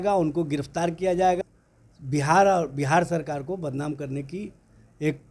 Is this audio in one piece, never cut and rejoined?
no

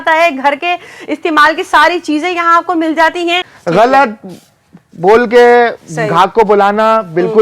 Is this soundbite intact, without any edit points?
no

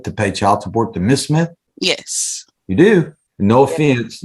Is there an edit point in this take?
yes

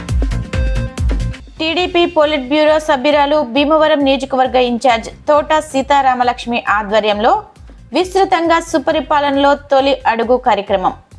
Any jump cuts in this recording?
yes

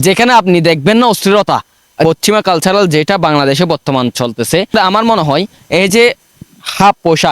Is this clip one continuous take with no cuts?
no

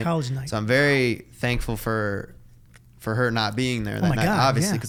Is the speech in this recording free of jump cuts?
yes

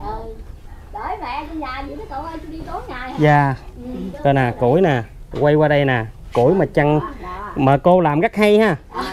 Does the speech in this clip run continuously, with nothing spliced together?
yes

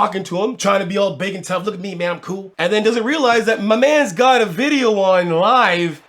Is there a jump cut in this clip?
yes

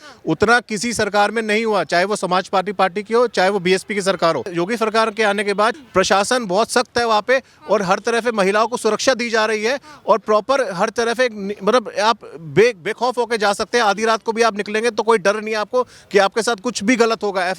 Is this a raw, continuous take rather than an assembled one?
no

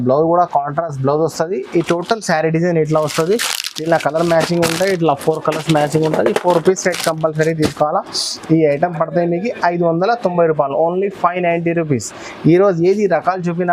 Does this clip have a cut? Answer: no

